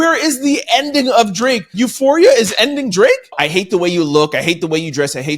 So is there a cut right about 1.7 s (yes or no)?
yes